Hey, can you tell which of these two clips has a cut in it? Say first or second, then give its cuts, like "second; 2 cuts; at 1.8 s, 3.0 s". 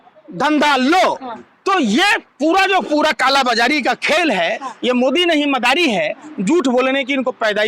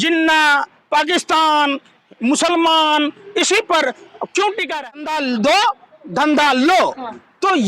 second; 1 cut; at 4.6 s